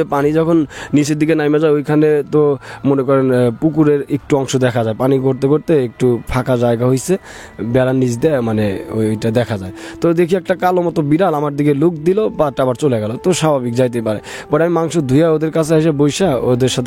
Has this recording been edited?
no; 0 cuts

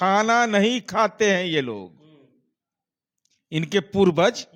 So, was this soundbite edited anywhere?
no; 0 cuts

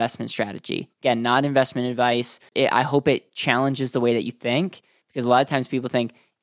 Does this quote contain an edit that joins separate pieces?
yes; 1 cut; at 2.4 s

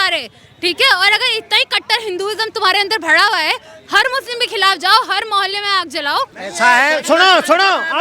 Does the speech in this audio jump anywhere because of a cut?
yes; 1 cut; at 6.4 s

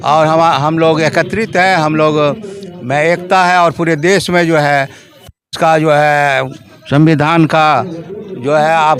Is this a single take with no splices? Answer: yes; 0 cuts

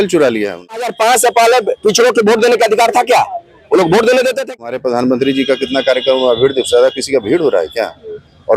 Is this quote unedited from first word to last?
no; 2 cuts; at 0.9 s, 4.6 s

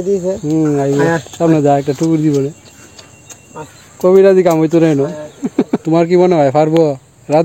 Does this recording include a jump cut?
yes; 1 cut; at 5.8 s

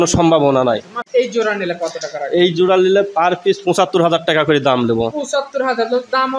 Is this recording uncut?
no; 1 cut; at 1.0 s

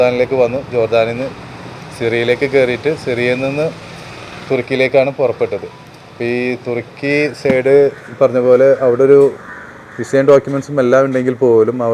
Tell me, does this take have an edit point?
no; 0 cuts

